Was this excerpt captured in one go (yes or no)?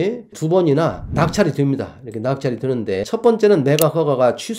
no